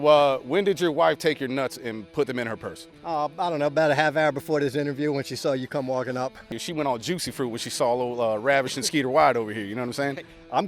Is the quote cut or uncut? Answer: cut